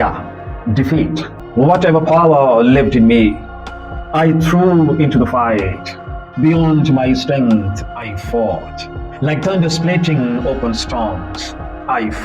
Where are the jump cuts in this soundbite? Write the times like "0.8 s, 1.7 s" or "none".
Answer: 1.3 s